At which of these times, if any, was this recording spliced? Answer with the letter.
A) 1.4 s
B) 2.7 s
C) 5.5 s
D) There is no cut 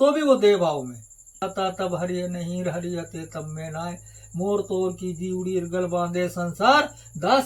A